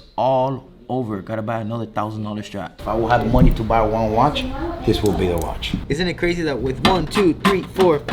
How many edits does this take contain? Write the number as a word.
two